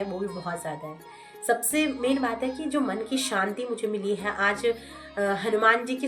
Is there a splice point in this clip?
no; 0 cuts

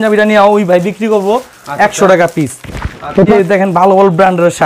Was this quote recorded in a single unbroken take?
no; 1 cut; at 3.3 s

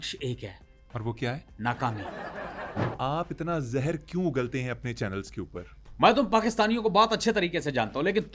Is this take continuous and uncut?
no; 2 cuts; at 2.9 s, 5.8 s

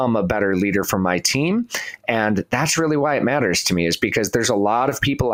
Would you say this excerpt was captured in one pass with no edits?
yes; 0 cuts

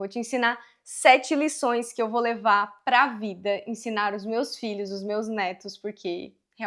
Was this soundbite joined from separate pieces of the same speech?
no; 0 cuts

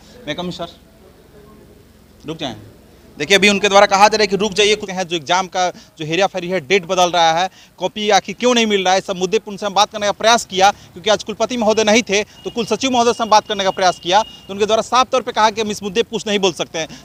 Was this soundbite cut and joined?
no; 0 cuts

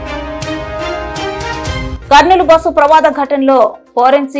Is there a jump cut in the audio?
yes; 1 cut; at 1.9 s

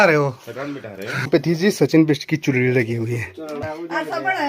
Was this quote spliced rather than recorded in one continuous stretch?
yes; 2 cuts; at 1.3 s, 3.6 s

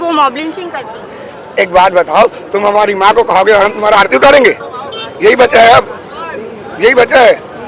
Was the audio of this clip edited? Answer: no; 0 cuts

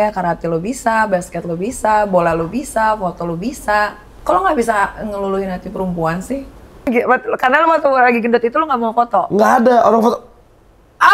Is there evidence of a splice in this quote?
yes; 2 cuts; at 4.1 s, 6.9 s

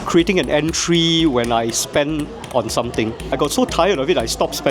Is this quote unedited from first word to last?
no; 1 cut; at 3.3 s

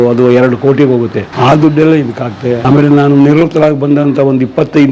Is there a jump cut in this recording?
yes; 2 cuts; at 1.2 s, 2.6 s

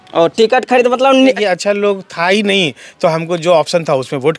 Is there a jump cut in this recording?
yes; 1 cut; at 1.4 s

